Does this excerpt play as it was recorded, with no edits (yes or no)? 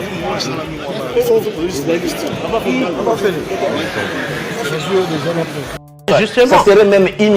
no